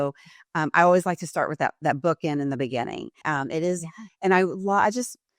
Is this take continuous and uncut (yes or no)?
no